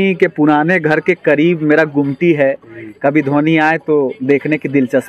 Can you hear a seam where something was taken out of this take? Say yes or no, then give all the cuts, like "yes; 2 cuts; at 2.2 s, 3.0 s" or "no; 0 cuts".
no; 0 cuts